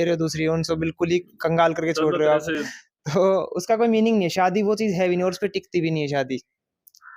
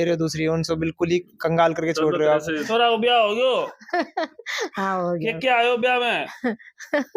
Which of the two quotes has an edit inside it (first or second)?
second